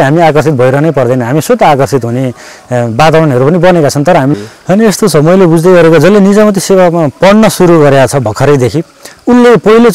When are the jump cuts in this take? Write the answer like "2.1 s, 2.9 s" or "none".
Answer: 4.3 s